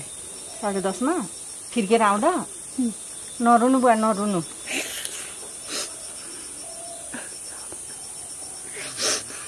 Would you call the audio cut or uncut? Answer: uncut